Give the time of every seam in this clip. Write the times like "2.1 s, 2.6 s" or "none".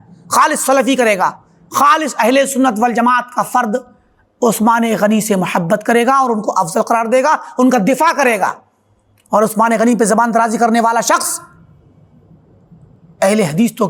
none